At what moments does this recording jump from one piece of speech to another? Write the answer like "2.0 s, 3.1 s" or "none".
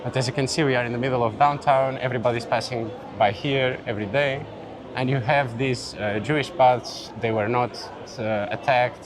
8.1 s

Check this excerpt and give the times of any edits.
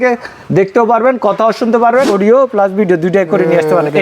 2.1 s

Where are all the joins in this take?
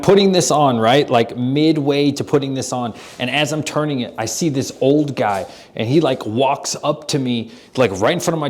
none

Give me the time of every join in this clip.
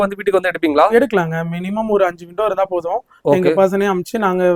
none

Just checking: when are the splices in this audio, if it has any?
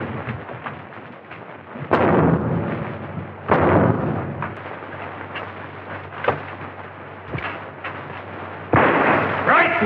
4.6 s

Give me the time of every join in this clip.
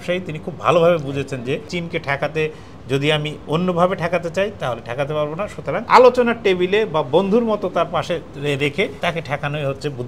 1.7 s, 5.8 s, 8.9 s

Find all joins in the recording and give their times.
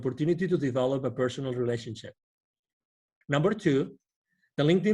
3.1 s

